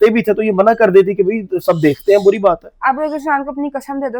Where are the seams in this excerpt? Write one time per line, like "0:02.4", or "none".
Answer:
none